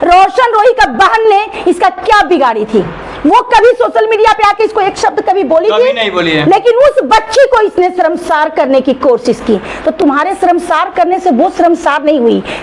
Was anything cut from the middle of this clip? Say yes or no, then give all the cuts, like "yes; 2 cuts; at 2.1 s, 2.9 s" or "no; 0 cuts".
no; 0 cuts